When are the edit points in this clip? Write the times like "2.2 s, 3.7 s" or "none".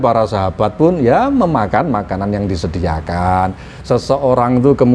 3.7 s